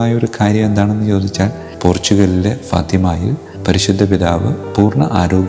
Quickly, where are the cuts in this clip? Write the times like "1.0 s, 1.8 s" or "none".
1.7 s